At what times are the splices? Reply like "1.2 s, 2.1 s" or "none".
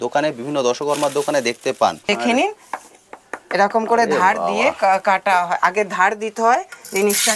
2.0 s